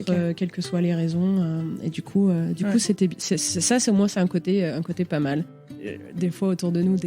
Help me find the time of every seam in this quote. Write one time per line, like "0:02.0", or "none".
0:05.5